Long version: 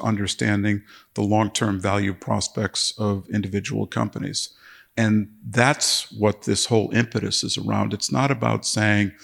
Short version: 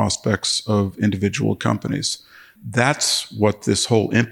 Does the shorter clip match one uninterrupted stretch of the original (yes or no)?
no